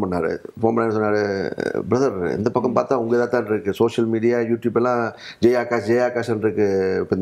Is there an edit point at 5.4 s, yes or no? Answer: no